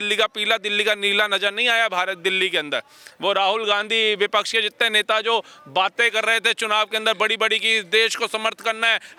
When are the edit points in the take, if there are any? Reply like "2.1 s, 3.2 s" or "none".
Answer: none